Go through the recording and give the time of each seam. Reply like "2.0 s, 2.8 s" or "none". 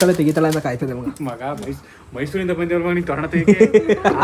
none

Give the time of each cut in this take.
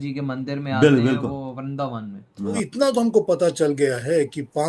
2.6 s

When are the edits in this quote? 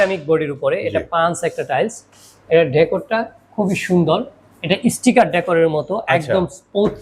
none

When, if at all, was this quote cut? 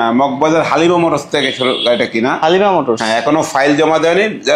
none

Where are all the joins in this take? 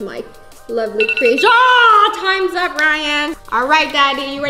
3.4 s

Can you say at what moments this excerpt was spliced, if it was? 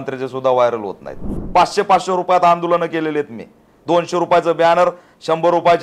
1.4 s

